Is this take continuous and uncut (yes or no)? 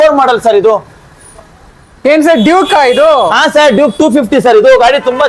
yes